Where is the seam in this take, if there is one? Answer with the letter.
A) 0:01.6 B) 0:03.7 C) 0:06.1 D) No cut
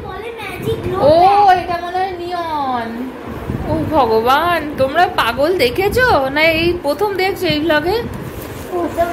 D